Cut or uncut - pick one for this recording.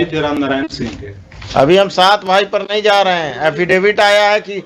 uncut